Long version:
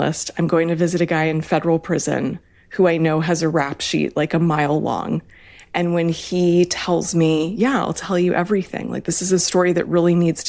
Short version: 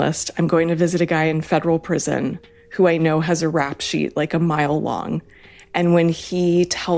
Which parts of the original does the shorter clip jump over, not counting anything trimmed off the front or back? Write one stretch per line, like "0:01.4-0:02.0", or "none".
none